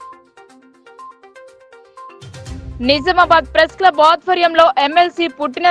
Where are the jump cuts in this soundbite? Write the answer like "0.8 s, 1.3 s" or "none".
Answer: 1.6 s